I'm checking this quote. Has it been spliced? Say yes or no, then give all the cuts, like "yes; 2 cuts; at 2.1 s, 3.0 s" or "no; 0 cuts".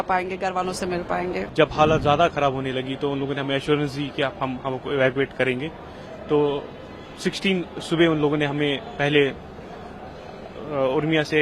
yes; 1 cut; at 1.5 s